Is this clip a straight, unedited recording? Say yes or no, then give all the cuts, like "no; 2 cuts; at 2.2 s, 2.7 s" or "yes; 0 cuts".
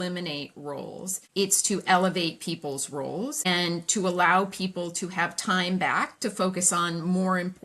no; 2 cuts; at 1.2 s, 3.5 s